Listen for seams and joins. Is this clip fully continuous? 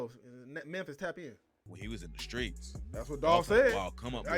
no; 1 cut; at 1.7 s

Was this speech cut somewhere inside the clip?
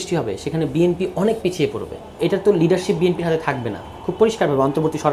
yes; 1 cut; at 2.2 s

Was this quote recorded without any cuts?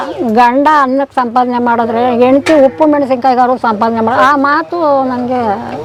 yes; 0 cuts

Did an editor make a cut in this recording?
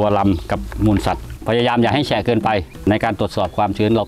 yes; 2 cuts; at 1.2 s, 2.8 s

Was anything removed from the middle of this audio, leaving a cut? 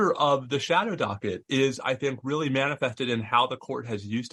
no; 0 cuts

